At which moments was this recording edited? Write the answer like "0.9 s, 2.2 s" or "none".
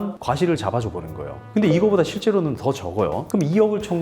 1.4 s, 3.2 s